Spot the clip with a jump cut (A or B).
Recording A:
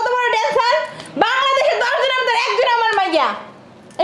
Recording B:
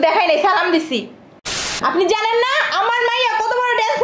B